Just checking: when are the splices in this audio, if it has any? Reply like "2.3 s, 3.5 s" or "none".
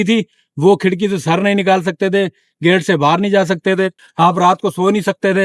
4.0 s